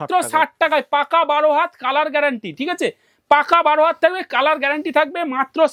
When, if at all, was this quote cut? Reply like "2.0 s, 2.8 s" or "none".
none